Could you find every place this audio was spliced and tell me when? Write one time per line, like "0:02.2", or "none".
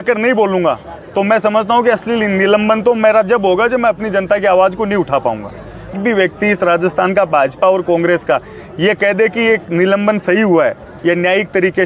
0:06.0